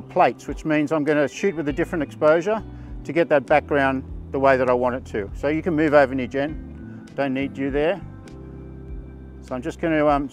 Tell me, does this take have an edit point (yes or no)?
no